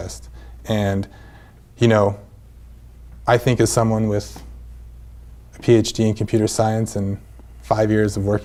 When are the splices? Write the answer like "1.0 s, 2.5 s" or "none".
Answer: none